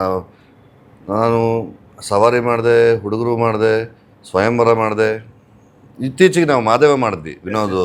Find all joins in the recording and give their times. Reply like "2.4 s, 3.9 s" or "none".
none